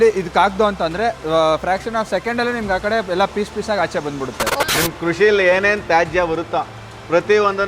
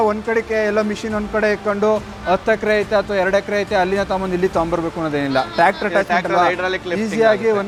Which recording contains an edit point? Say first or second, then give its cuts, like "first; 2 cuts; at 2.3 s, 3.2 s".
first; 1 cut; at 4.6 s